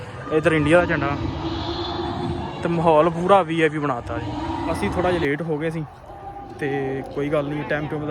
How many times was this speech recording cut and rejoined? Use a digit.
1